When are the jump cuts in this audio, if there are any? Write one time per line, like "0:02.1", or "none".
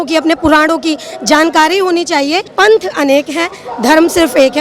0:02.5